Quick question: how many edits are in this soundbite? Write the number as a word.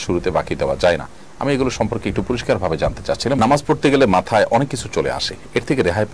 one